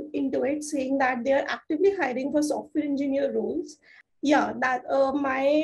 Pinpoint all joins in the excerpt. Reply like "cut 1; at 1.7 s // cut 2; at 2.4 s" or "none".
cut 1; at 4.0 s